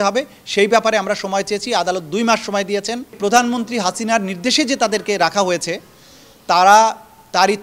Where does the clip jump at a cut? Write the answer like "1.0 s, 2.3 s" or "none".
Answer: 3.2 s